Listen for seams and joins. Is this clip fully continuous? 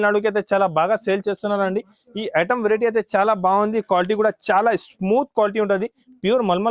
yes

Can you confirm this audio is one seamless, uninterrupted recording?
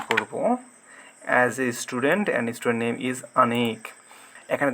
yes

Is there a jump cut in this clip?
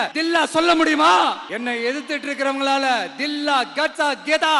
yes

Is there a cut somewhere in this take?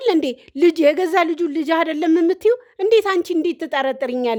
no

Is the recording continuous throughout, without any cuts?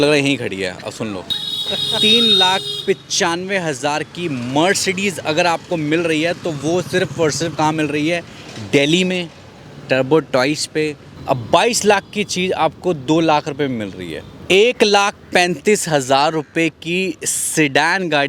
no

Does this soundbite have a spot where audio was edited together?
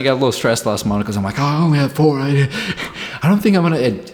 no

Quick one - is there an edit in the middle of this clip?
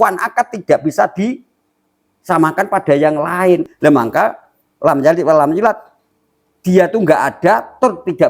yes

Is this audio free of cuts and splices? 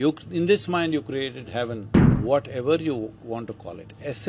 no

